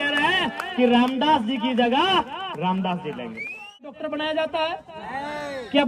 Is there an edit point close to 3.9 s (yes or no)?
yes